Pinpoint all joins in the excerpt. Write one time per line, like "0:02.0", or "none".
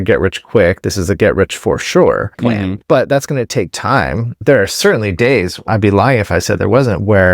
0:02.4
0:04.4
0:05.7